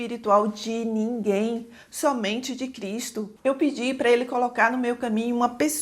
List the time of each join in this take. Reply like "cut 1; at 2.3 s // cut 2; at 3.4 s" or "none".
cut 1; at 3.3 s